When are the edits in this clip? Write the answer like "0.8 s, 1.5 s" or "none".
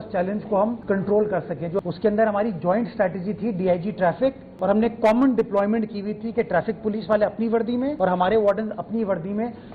1.8 s, 4.5 s, 7.9 s